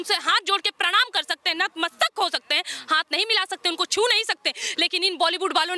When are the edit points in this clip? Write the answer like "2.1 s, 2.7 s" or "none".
none